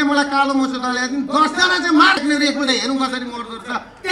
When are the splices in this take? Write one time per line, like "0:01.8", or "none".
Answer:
0:02.2